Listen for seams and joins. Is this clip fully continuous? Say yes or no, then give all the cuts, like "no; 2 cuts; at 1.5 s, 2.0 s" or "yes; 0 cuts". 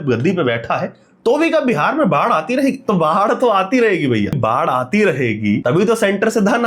no; 2 cuts; at 4.4 s, 5.6 s